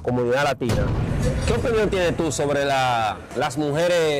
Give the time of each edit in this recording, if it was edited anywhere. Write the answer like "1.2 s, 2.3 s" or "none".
0.9 s